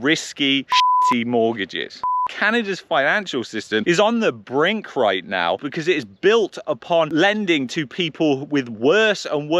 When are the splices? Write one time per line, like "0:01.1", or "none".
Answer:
0:02.0
0:05.6